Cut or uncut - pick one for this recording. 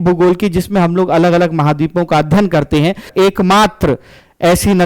cut